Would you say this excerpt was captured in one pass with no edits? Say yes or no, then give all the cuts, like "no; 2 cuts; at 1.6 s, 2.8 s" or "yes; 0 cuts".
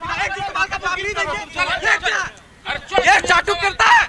yes; 0 cuts